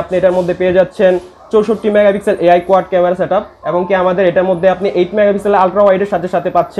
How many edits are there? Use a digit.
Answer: 0